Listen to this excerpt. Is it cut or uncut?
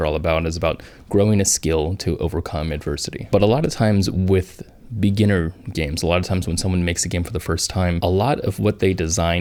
uncut